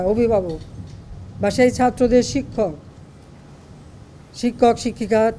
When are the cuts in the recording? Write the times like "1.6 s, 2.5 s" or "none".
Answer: none